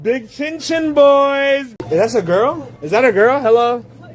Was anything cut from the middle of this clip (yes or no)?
yes